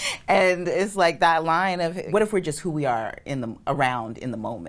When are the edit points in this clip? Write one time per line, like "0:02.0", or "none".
0:02.0